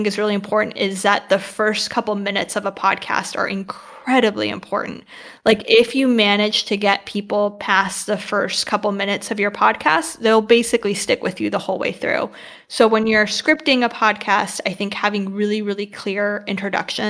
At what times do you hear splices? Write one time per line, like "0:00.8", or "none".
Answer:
none